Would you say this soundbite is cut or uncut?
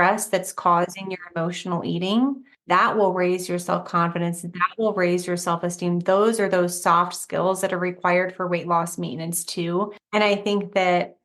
cut